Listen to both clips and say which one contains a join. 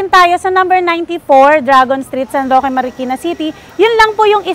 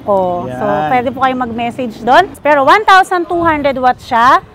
second; 1 cut; at 2.4 s

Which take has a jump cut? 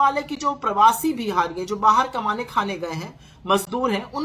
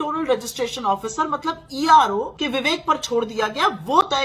second; 1 cut; at 2.3 s

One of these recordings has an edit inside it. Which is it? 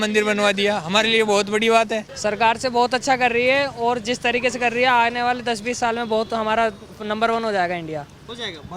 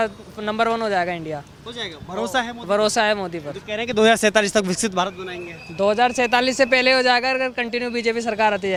first; 1 cut; at 2.1 s

